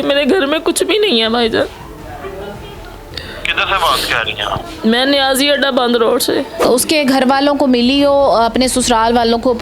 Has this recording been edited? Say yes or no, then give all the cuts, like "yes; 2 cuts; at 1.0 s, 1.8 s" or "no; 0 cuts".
yes; 1 cut; at 6.7 s